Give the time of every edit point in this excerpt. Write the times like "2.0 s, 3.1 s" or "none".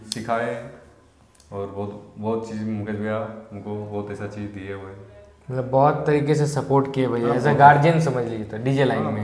none

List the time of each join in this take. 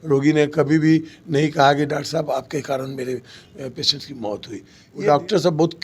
4.8 s

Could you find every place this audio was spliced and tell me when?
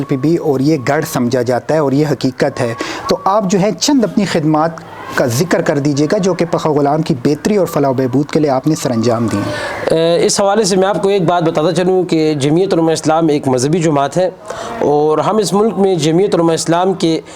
none

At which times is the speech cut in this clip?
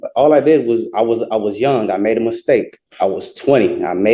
2.8 s

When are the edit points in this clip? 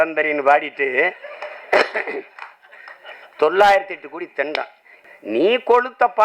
4.8 s

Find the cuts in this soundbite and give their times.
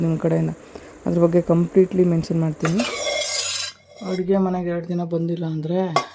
2.9 s

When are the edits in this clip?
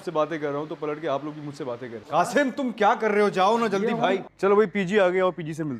2.0 s, 4.3 s

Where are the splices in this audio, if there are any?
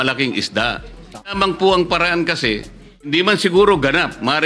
1.3 s, 3.1 s

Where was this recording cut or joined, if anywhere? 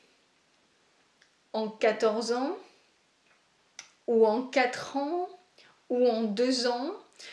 none

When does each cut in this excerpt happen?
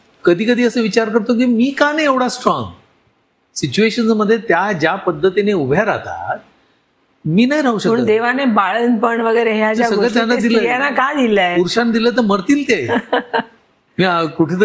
none

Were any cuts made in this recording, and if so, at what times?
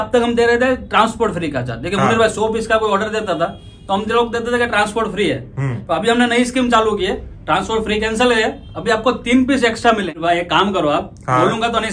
10.1 s

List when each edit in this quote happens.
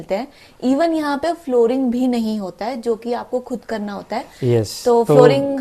none

